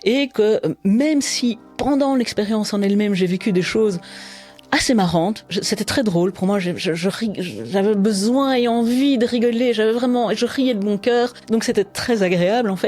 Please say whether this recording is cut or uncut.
cut